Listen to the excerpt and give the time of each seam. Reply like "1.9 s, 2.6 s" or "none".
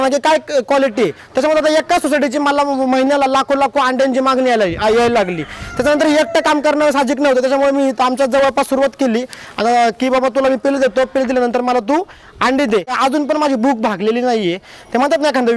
12.9 s

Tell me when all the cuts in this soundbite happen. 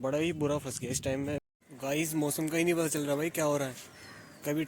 1.5 s

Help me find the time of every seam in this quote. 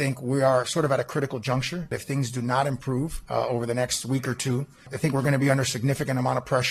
1.9 s, 3.2 s, 4.9 s

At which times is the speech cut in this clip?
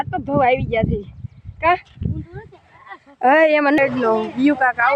3.8 s

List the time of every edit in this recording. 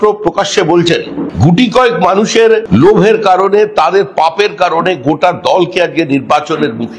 1.3 s, 2.6 s

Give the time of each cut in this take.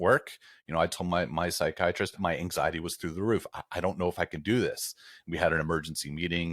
2.2 s

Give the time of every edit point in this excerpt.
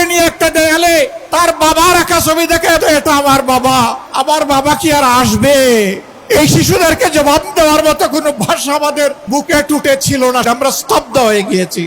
1.2 s, 2.8 s, 4.1 s, 6.1 s, 9.2 s, 10.4 s

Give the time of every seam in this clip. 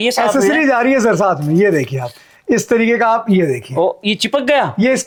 none

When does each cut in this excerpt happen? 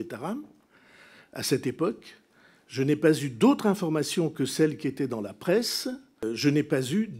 6.2 s

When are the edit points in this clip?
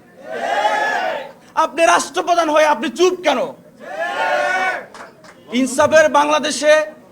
1.4 s

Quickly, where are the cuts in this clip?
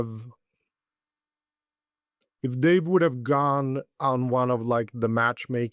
none

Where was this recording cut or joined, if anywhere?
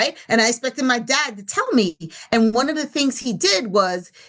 none

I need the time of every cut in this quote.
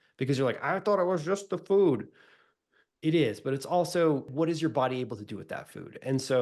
4.3 s

